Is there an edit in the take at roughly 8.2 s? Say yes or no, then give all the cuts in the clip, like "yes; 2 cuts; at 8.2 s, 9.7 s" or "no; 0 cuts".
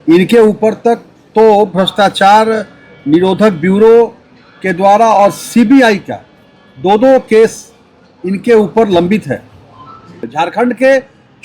no; 1 cut; at 10.3 s